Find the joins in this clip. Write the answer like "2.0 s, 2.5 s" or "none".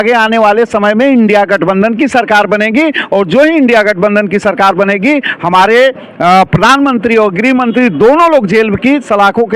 none